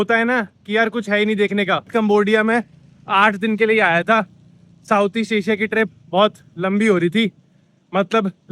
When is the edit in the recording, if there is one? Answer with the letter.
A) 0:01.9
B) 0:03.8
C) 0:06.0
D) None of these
A